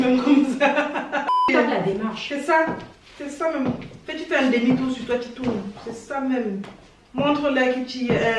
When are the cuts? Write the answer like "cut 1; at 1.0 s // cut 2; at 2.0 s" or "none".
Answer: cut 1; at 1.3 s